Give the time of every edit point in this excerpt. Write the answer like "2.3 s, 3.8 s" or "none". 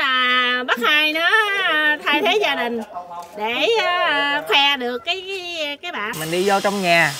6.1 s